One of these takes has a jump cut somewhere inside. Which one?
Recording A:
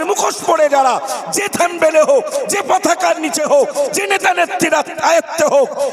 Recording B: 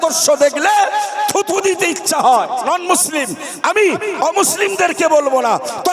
B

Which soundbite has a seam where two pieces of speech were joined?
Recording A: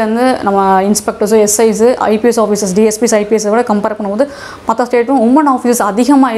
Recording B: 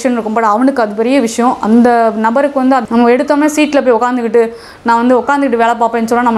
B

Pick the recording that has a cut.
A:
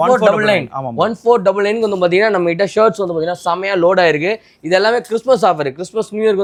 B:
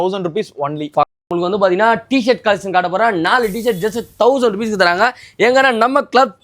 B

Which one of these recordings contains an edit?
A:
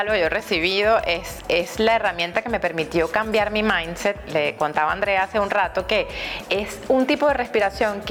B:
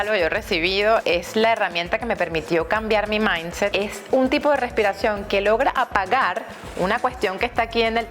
B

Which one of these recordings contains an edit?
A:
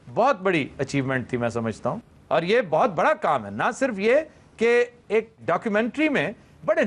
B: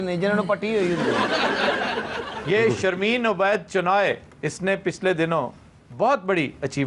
A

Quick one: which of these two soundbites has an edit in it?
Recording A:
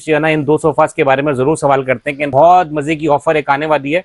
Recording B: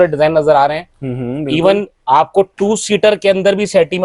A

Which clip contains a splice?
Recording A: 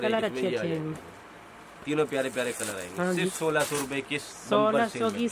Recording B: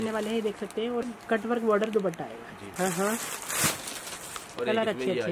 B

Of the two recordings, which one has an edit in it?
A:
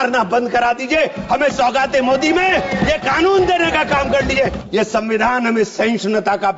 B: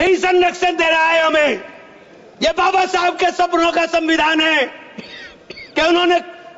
A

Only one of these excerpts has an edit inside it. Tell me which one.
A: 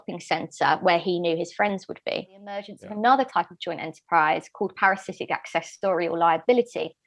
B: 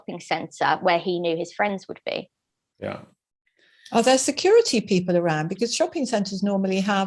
A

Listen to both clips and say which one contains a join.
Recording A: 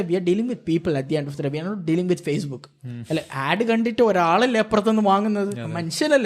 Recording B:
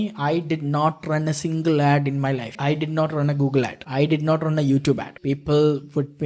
B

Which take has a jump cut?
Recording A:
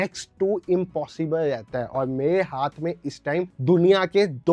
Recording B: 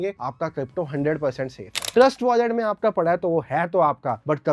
B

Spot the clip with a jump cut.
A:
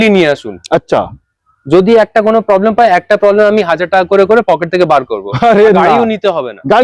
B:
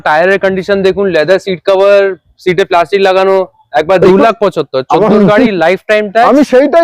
B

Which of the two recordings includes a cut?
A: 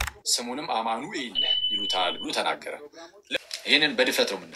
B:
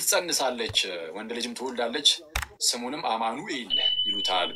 A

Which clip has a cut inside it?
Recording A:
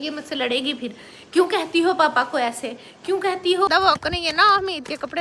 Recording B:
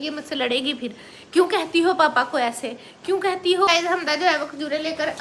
A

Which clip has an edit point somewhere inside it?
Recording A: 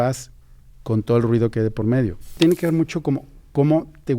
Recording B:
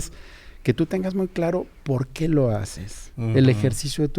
A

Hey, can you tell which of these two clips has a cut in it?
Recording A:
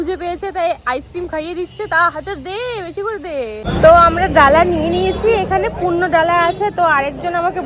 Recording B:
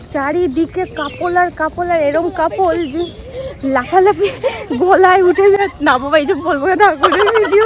A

